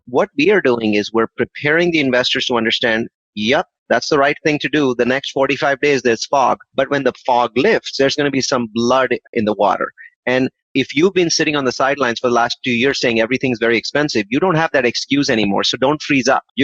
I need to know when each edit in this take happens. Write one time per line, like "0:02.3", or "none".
none